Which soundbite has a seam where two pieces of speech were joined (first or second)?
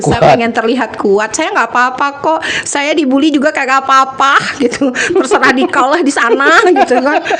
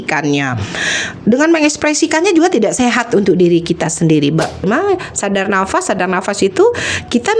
second